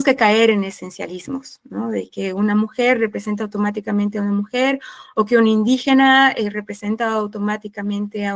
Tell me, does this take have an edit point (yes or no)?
no